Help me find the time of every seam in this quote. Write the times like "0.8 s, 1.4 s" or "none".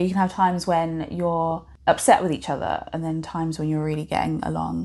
1.7 s